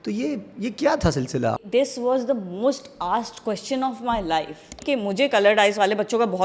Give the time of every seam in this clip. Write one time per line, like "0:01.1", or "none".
0:01.5
0:04.8

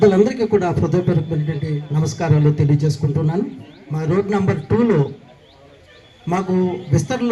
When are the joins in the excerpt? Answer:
none

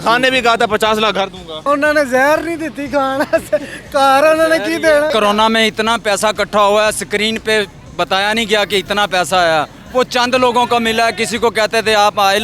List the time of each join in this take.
0:01.5
0:05.1

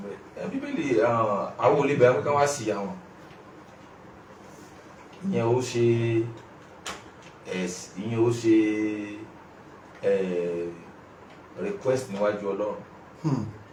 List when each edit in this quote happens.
none

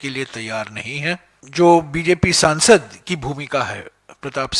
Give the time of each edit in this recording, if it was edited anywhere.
0:01.3

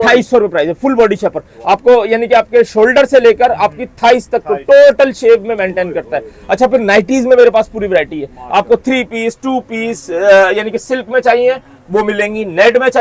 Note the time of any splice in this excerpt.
none

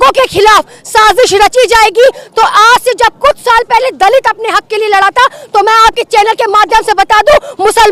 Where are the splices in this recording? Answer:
none

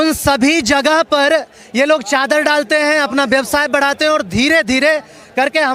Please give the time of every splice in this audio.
none

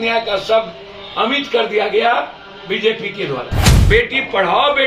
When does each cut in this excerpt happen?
0:03.7

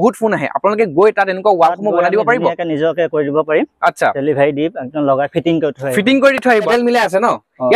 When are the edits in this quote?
0:06.5

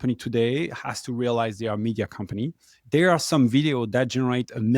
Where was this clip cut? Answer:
0:02.8

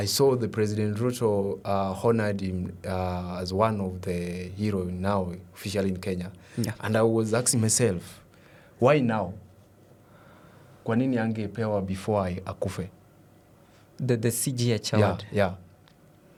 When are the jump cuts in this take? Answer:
none

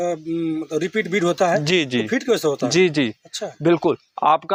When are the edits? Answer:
none

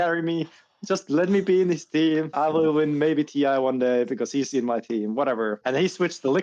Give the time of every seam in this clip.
0:02.3
0:05.6

